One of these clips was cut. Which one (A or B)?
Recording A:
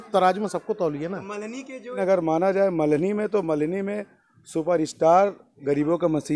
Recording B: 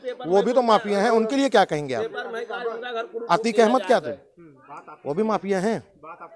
A